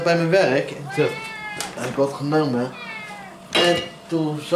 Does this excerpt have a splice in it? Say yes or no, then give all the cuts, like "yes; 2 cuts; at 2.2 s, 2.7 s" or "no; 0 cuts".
no; 0 cuts